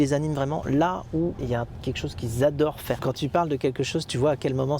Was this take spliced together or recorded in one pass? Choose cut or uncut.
cut